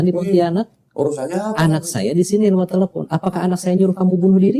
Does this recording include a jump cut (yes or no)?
no